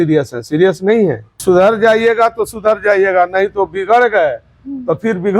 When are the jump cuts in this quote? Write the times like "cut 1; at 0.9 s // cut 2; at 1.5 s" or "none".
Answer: cut 1; at 1.4 s